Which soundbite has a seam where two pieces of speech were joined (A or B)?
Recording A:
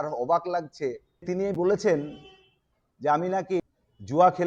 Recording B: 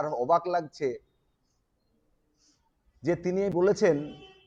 A